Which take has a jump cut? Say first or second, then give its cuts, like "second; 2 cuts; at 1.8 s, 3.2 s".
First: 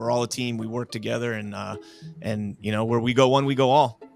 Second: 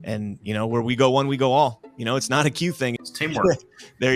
second; 1 cut; at 3.1 s